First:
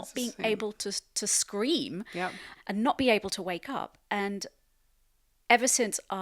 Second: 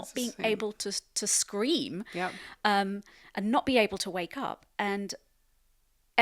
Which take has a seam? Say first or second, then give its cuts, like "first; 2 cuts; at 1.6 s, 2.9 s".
first; 1 cut; at 2.5 s